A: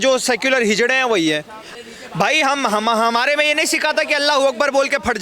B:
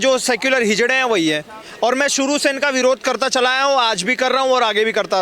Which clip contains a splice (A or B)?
A